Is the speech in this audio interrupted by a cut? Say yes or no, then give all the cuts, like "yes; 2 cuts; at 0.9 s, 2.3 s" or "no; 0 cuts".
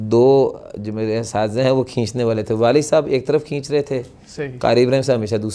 no; 0 cuts